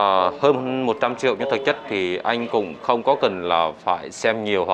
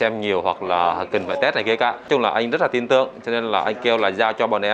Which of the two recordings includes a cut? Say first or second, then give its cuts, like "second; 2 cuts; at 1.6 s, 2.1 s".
second; 1 cut; at 2.0 s